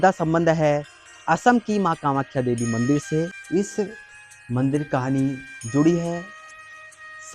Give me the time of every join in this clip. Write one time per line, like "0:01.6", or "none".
0:03.4